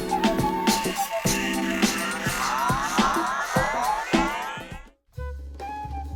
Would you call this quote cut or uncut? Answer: uncut